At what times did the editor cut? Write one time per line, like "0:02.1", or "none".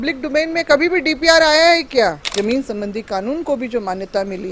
0:02.2